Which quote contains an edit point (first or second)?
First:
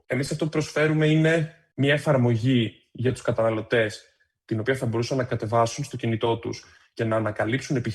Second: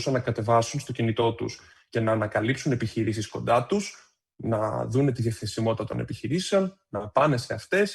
first